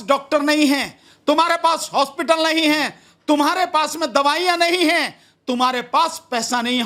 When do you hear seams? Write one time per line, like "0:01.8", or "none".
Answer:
none

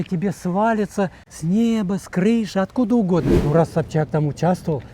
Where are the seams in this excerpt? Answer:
0:01.3
0:03.4

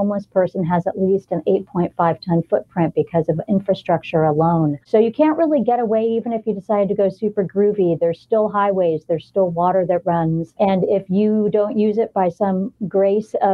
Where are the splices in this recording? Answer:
none

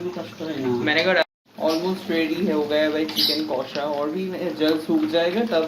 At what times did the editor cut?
0:01.3

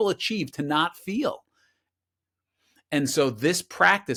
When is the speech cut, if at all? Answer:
none

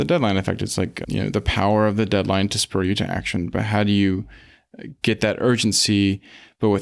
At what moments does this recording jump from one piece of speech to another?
0:01.0

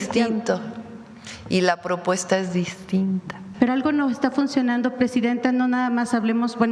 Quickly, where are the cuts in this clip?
0:03.5

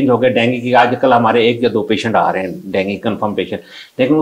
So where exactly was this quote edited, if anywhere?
none

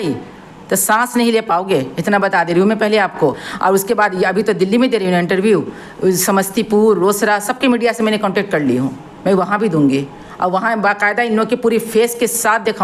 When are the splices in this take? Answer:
none

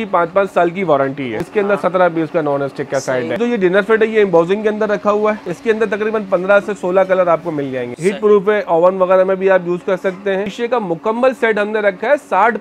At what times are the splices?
0:01.4
0:03.4
0:05.5
0:07.9
0:10.5

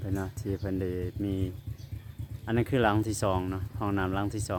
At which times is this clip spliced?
none

